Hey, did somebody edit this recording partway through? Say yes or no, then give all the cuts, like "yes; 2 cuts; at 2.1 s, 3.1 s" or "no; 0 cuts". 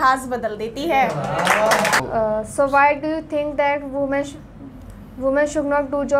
no; 0 cuts